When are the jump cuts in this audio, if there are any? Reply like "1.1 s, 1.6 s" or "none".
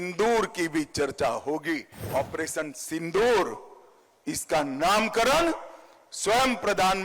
2.1 s